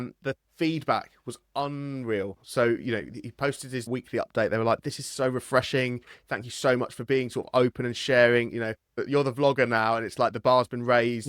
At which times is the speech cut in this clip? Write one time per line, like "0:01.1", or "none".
none